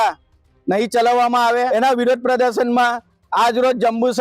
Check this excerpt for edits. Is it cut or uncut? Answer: cut